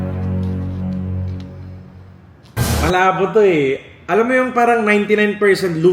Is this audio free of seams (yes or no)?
yes